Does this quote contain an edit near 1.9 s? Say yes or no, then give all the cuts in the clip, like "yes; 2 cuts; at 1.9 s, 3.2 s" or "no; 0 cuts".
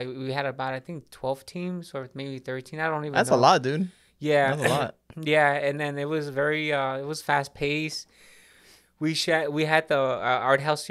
no; 0 cuts